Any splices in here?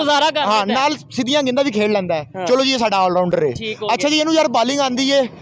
no; 0 cuts

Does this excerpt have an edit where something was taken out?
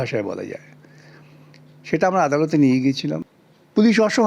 yes; 1 cut; at 3.3 s

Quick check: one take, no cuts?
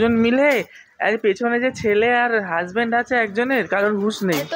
yes; 0 cuts

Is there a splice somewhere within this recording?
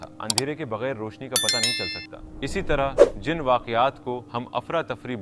no; 0 cuts

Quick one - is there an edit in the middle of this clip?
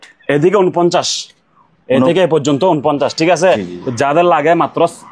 yes; 1 cut; at 3.7 s

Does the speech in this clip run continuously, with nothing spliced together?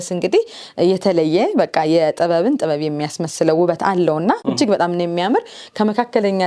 yes; 0 cuts

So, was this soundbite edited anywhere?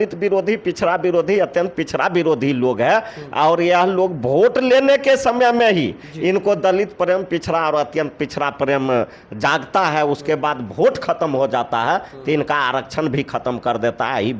no; 0 cuts

